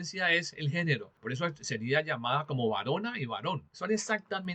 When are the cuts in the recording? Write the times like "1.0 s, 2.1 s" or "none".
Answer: 1.1 s, 3.4 s